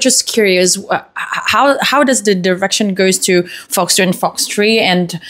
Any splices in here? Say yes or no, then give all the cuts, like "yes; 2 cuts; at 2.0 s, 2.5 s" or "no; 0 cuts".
no; 0 cuts